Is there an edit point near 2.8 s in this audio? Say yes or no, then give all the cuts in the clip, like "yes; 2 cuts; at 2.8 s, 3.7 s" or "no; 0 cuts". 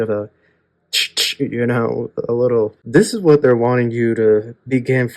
yes; 1 cut; at 2.8 s